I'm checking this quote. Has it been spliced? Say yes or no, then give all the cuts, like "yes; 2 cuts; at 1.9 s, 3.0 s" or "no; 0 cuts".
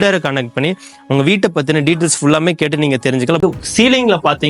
yes; 1 cut; at 3.4 s